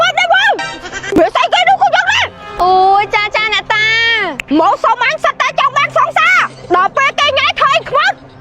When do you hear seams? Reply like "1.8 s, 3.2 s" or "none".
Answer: 1.1 s